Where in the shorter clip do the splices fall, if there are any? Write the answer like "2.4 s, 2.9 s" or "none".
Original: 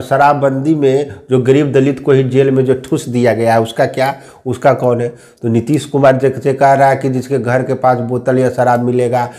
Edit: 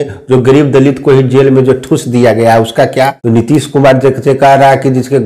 3.2 s